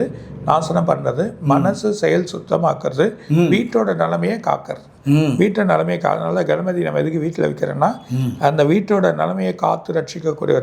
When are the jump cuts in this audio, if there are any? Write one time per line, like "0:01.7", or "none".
none